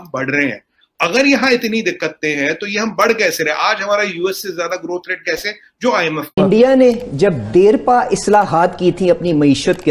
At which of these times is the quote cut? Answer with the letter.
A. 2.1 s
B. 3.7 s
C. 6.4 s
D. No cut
C